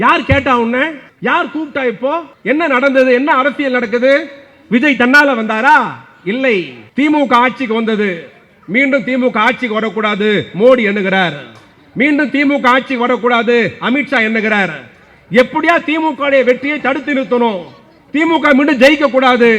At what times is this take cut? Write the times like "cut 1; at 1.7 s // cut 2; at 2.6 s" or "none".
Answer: cut 1; at 1.0 s // cut 2; at 2.3 s // cut 3; at 6.8 s